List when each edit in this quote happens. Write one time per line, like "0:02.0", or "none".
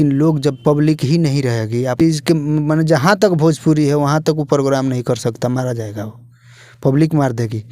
0:01.9